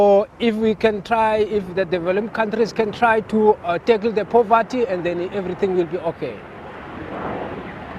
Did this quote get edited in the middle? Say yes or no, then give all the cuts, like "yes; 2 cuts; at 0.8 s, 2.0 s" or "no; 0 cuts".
yes; 1 cut; at 1.0 s